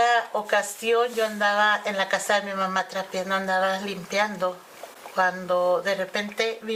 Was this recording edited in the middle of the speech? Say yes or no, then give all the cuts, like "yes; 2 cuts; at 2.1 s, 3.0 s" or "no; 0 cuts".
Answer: no; 0 cuts